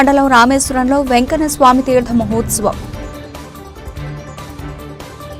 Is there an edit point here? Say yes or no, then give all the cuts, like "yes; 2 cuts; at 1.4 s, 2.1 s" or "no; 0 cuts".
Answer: no; 0 cuts